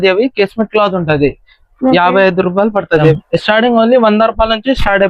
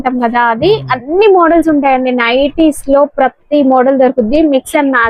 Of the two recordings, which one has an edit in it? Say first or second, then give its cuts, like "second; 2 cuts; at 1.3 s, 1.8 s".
first; 1 cut; at 3.2 s